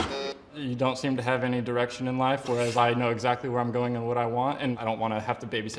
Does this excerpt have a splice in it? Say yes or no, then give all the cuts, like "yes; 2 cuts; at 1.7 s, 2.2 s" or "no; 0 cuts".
yes; 1 cut; at 4.8 s